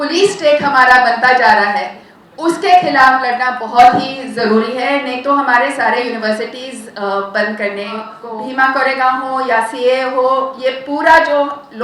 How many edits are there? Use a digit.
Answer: 1